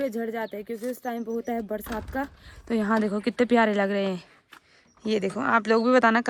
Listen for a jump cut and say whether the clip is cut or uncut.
uncut